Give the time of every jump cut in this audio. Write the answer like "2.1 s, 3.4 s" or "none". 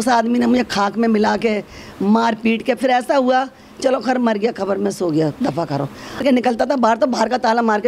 6.3 s

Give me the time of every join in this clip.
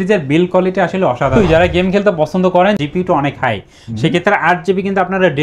1.5 s, 2.8 s

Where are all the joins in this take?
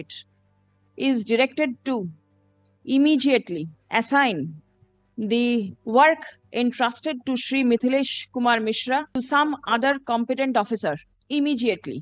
3.8 s, 5.8 s, 9.1 s, 11.1 s

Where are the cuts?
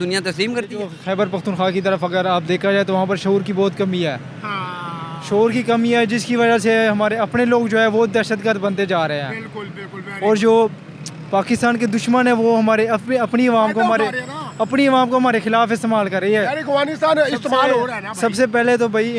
1.0 s

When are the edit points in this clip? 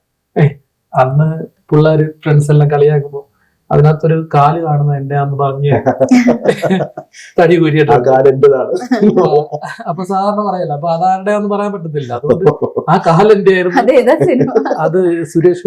none

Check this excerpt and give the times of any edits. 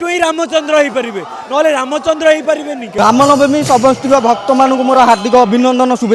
2.9 s

